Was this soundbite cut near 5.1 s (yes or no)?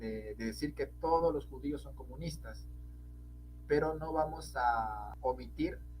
yes